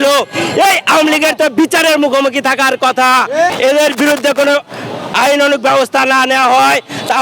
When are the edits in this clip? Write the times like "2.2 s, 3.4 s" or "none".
3.5 s